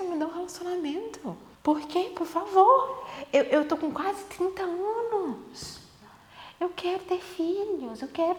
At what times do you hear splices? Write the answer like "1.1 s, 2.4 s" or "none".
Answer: none